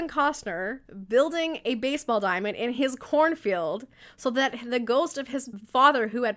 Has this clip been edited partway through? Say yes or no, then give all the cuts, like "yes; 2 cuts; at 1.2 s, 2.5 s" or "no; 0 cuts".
no; 0 cuts